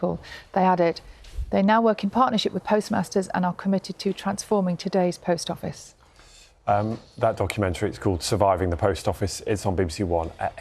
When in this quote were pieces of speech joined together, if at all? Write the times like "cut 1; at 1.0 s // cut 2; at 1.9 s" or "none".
none